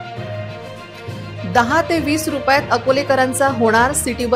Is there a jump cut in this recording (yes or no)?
no